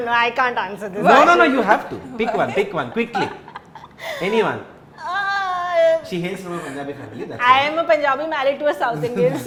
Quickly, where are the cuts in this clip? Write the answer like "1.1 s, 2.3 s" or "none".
none